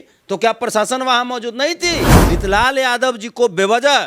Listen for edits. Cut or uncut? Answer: cut